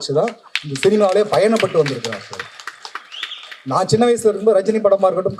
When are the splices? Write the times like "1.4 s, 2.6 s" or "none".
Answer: none